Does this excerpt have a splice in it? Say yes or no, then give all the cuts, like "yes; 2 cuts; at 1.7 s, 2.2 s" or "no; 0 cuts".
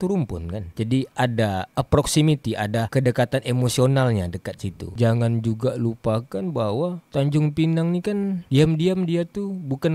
no; 0 cuts